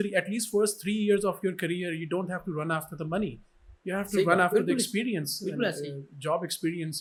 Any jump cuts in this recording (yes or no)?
no